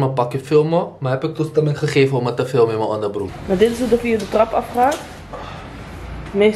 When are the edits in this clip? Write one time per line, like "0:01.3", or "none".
0:03.3